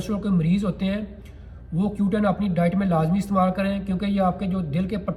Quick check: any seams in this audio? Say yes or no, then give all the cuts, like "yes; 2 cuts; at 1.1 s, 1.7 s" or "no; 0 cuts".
no; 0 cuts